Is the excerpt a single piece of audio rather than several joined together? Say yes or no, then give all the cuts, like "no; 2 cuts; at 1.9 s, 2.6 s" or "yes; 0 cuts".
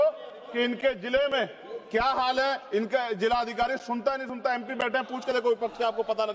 yes; 0 cuts